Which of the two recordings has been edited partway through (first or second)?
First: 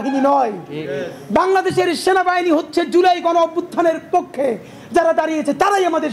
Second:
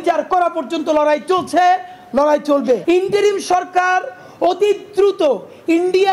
second